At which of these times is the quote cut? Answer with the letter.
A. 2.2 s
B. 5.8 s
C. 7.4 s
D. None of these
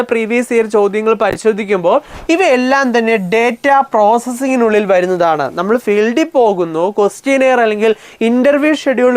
A